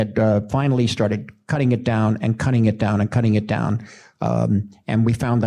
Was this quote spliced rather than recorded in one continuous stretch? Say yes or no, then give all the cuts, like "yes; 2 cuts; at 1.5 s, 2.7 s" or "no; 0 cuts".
no; 0 cuts